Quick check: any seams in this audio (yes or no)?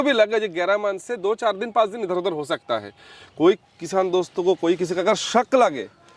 no